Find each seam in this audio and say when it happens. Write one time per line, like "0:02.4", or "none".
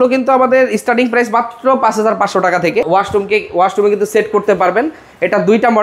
0:02.9

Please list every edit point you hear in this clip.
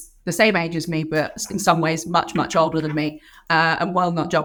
none

